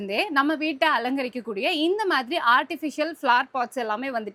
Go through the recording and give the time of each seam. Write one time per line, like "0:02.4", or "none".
none